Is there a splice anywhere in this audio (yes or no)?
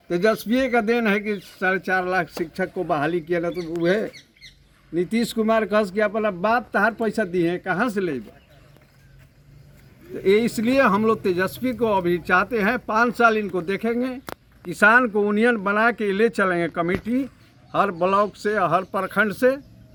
no